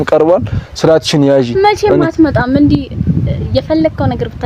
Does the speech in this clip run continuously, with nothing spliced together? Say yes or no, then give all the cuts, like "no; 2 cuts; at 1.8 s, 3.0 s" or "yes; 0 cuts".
yes; 0 cuts